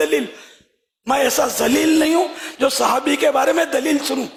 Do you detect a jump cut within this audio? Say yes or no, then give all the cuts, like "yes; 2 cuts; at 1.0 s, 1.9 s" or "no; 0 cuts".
no; 0 cuts